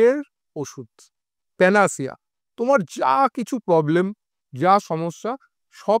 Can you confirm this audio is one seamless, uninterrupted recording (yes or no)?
yes